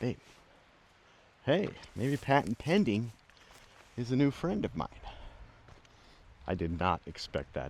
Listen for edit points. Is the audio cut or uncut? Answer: cut